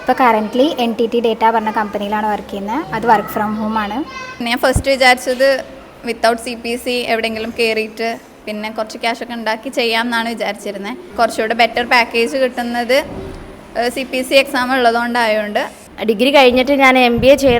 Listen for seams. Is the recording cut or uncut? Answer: cut